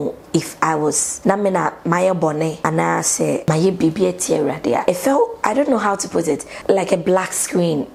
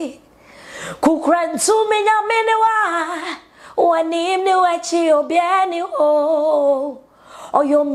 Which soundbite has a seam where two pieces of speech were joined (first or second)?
first